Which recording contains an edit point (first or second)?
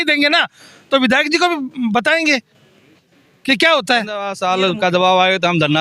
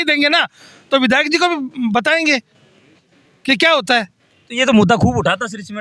first